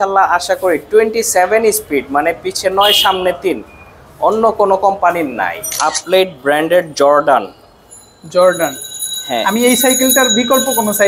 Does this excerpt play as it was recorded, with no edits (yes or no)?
no